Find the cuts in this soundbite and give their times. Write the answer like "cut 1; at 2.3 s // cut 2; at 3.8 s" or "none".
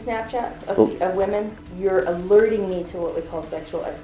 cut 1; at 1.6 s